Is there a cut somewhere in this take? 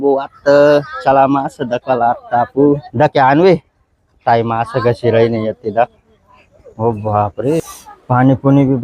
yes; 2 cuts; at 2.9 s, 7.6 s

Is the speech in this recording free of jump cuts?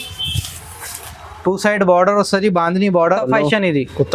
no; 1 cut; at 3.1 s

